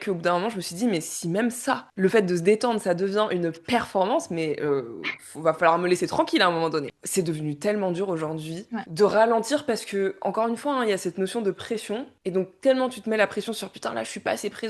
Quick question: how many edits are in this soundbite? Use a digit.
1